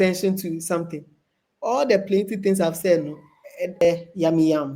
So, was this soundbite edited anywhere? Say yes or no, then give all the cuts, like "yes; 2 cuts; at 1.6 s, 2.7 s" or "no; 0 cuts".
yes; 1 cut; at 3.8 s